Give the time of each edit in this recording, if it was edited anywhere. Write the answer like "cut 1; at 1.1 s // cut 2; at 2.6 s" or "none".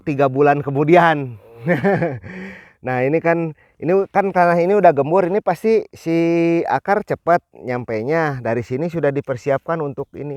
none